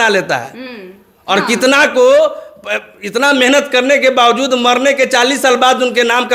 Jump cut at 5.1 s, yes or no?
no